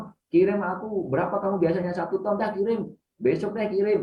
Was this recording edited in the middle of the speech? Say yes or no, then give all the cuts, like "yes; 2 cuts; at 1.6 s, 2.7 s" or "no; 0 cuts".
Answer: no; 0 cuts